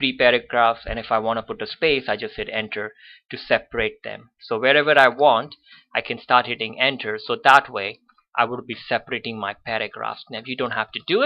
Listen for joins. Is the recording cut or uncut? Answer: uncut